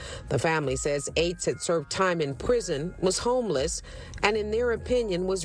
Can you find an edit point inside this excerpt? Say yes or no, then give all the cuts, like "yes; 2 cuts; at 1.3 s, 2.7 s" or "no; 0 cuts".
no; 0 cuts